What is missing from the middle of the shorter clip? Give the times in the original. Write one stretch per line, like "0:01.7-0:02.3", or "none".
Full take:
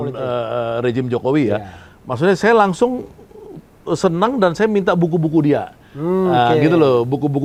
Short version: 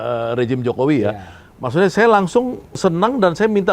0:03.2-0:04.0